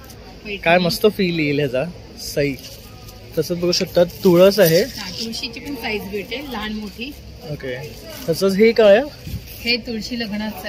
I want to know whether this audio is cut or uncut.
uncut